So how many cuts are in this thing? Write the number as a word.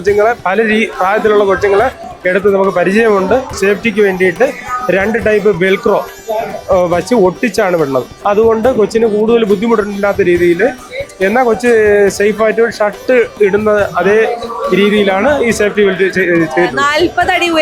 three